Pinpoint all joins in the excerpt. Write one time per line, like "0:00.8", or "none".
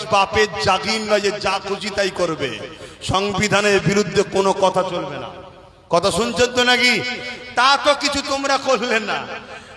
none